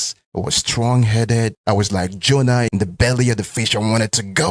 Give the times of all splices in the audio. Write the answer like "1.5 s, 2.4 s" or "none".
1.6 s, 2.7 s